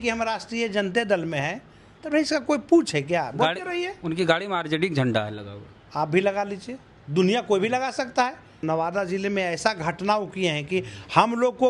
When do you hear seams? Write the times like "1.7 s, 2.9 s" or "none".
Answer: 8.5 s